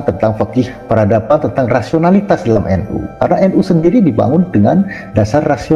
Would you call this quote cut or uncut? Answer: uncut